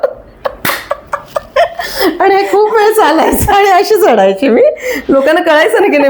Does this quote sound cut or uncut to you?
uncut